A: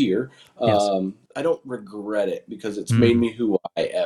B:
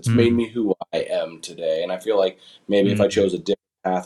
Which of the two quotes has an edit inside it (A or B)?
A